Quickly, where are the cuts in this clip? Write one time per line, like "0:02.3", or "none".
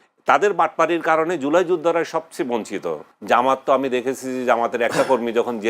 0:03.1